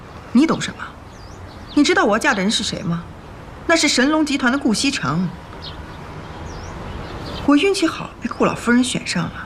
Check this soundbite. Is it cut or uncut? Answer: uncut